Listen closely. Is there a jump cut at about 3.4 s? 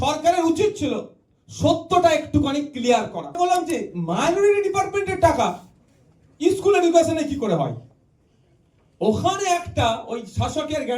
yes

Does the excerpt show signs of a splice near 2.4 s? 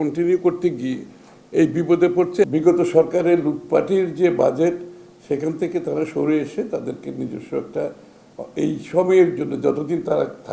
yes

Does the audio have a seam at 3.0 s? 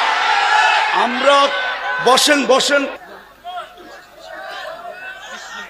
yes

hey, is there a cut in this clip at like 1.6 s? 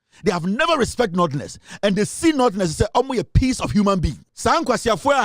no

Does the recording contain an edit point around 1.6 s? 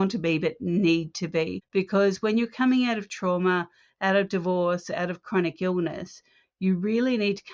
yes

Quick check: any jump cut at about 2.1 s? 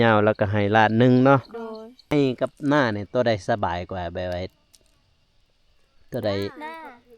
yes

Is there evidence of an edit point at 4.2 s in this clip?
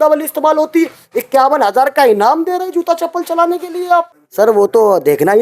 yes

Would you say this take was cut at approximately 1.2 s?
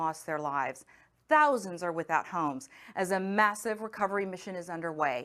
no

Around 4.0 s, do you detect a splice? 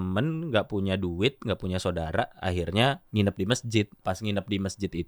yes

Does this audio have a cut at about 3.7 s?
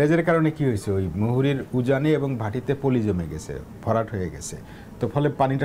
no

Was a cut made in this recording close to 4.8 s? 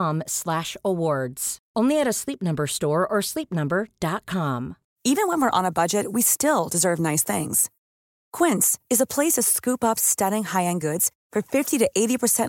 yes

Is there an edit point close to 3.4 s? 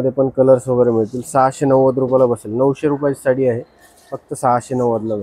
no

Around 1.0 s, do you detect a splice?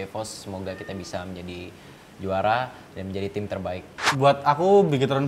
no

